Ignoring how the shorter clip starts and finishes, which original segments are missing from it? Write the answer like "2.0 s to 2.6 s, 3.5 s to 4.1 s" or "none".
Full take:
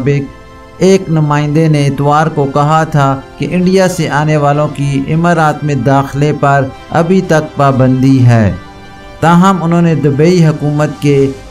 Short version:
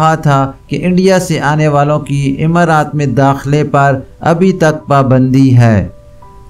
none